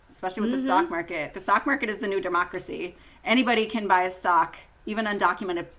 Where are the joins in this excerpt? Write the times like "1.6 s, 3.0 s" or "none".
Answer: 1.3 s